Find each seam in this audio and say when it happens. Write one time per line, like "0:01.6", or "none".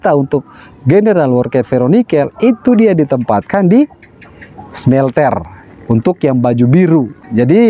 none